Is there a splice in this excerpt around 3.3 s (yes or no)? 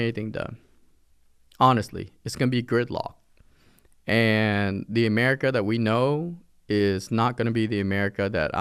no